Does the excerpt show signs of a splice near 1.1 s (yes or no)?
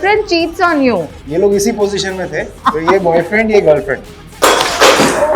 yes